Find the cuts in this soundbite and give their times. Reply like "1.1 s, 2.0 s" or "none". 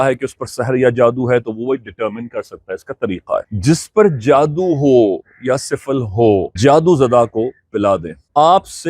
6.5 s